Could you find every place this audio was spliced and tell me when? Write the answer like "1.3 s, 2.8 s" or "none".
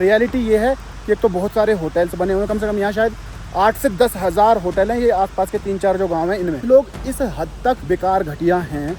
6.6 s